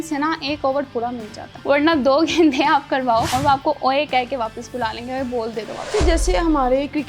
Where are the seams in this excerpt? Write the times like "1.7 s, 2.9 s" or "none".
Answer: 1.5 s, 3.3 s, 5.9 s